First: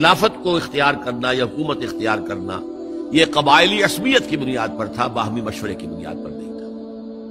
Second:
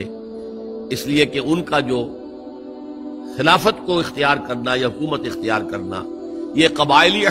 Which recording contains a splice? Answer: first; 1 cut; at 5.9 s

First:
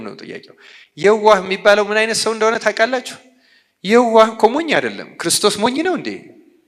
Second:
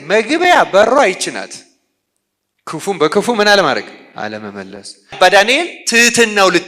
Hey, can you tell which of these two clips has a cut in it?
second; 1 cut; at 5.2 s

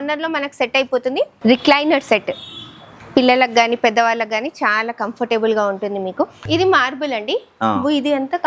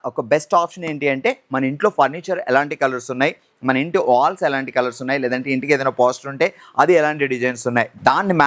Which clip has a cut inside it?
first; 2 cuts; at 1.4 s, 6.4 s

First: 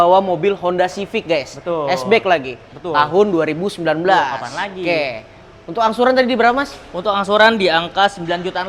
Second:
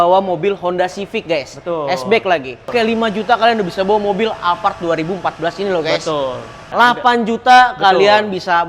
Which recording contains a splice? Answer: second; 2 cuts; at 2.7 s, 6.6 s

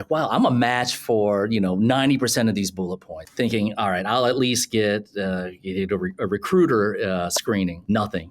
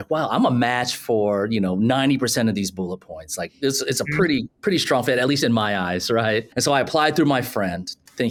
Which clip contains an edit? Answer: first; 1 cut; at 3.2 s

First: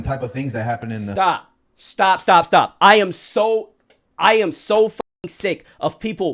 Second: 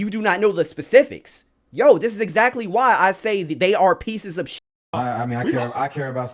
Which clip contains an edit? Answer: second; 1 cut; at 4.9 s

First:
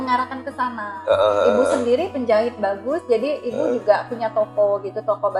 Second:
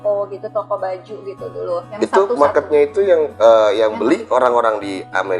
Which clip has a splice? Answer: second; 1 cut; at 2.0 s

